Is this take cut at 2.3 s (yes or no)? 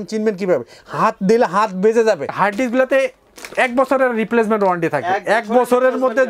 yes